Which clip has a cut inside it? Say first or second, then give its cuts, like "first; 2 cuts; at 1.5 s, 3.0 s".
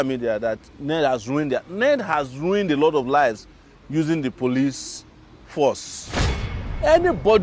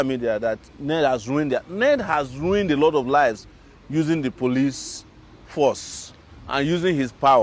first; 1 cut; at 6.5 s